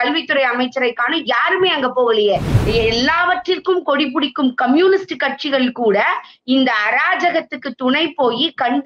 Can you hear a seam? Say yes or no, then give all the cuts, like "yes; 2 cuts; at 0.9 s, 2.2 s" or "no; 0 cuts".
yes; 1 cut; at 2.5 s